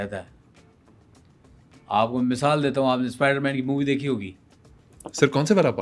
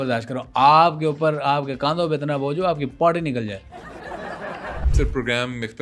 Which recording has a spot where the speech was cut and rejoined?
second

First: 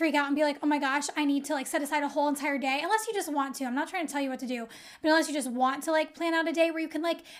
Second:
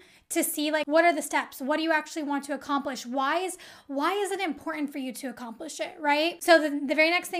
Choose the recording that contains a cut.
second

